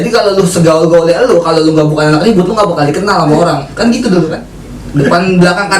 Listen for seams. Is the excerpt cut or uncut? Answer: cut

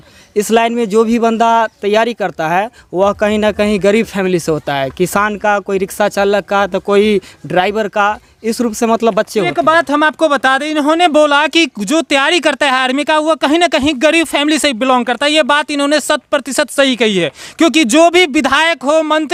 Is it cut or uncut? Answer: uncut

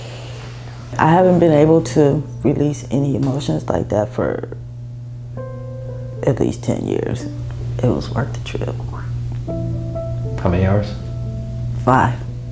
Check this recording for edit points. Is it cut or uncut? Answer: cut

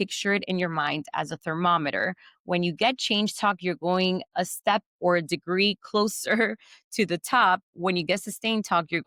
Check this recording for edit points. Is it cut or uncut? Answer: uncut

